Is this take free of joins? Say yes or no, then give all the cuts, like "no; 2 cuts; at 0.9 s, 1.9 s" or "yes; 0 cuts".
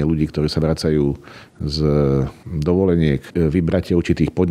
no; 1 cut; at 3.3 s